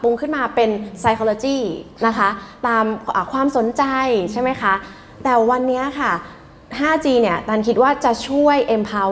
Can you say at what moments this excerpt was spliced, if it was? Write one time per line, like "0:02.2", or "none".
none